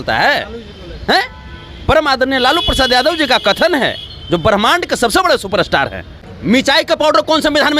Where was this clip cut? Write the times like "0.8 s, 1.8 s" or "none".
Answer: 6.2 s